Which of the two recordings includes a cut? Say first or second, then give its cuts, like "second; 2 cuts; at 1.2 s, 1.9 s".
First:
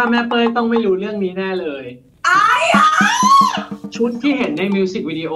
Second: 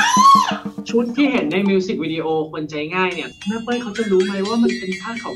second; 1 cut; at 3.3 s